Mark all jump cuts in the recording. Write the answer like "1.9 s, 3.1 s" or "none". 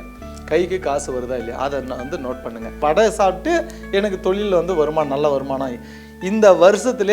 2.8 s

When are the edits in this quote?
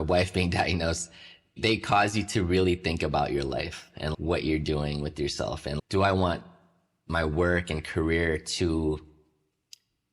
4.1 s

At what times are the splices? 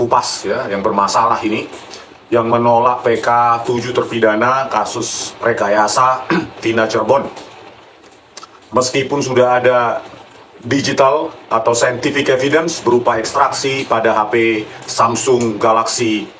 none

